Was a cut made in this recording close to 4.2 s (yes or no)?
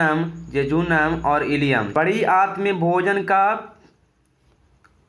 no